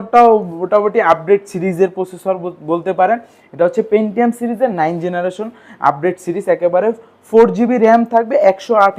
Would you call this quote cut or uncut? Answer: uncut